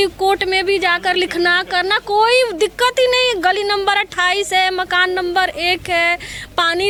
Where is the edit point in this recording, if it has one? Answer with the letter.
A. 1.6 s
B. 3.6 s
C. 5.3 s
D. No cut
D